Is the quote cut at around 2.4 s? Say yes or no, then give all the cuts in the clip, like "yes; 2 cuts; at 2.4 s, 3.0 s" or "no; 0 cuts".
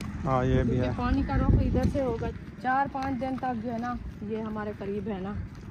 yes; 1 cut; at 2.4 s